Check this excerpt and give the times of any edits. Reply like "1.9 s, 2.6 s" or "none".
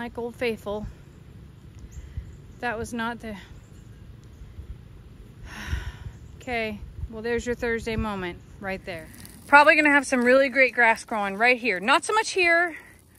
9.3 s